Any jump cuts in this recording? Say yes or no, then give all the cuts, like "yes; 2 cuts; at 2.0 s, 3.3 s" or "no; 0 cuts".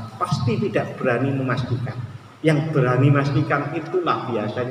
no; 0 cuts